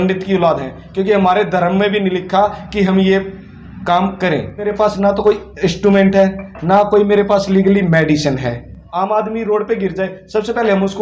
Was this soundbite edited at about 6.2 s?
no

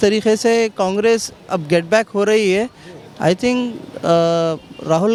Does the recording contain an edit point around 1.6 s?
no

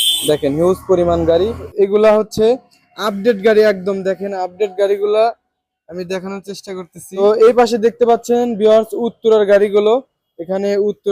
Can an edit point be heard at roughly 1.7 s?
yes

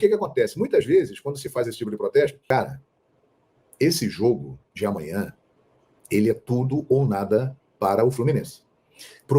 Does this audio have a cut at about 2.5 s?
yes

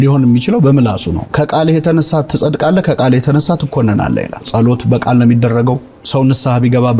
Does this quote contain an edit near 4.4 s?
yes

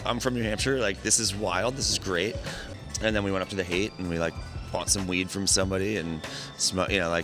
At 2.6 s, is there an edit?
yes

